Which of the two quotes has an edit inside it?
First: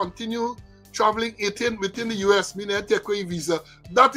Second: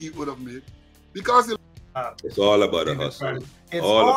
second; 1 cut; at 1.6 s

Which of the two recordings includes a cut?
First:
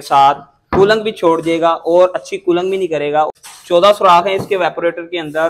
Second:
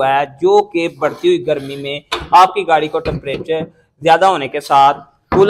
first; 1 cut; at 3.3 s

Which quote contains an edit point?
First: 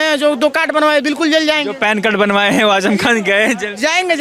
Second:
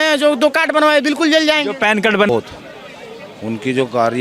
second; 1 cut; at 2.3 s

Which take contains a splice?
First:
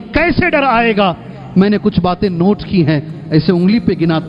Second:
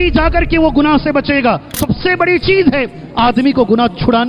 second; 1 cut; at 1.8 s

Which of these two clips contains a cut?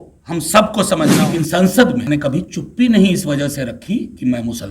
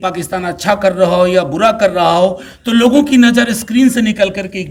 first; 2 cuts; at 1.2 s, 2.0 s

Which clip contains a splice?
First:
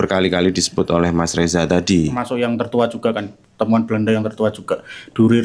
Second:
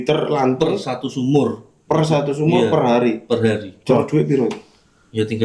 first; 1 cut; at 2.2 s

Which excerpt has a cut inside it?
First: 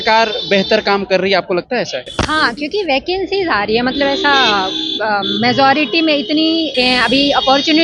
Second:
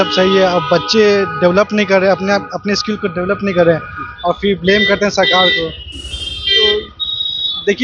first; 2 cuts; at 2.1 s, 6.7 s

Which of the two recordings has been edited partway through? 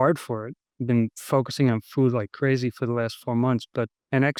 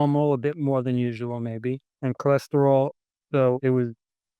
second; 1 cut; at 1.8 s

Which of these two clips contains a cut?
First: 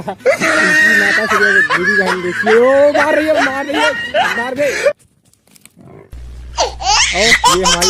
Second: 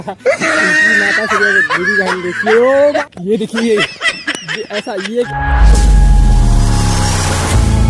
second; 2 cuts; at 3.0 s, 5.3 s

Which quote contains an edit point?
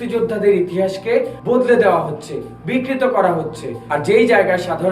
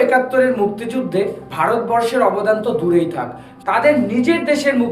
first; 2 cuts; at 1.3 s, 3.7 s

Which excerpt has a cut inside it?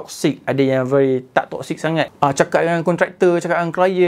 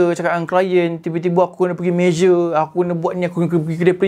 first; 1 cut; at 2.1 s

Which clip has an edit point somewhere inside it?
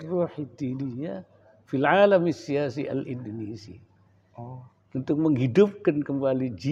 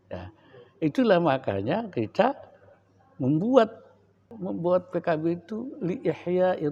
second; 1 cut; at 4.3 s

